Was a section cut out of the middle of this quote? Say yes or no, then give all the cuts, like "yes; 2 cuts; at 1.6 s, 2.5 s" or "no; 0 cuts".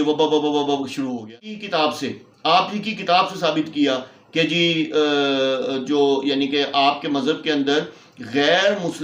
yes; 1 cut; at 1.5 s